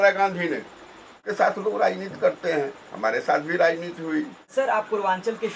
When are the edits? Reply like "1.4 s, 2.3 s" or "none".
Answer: 1.3 s, 4.5 s